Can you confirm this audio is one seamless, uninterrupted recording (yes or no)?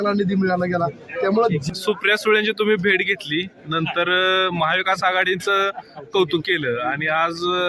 no